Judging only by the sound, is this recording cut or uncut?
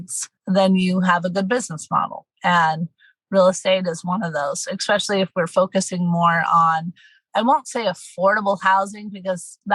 uncut